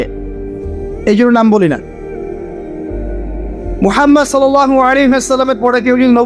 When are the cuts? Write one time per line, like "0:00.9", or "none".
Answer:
none